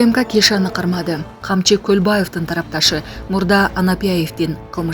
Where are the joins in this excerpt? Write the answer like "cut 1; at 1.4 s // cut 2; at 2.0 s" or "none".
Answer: cut 1; at 1.3 s